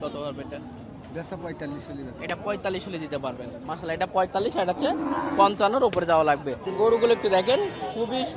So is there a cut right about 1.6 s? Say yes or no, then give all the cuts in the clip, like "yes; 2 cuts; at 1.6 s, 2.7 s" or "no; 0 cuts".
no; 1 cut; at 6.7 s